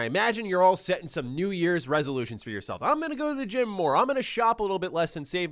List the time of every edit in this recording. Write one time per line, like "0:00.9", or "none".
none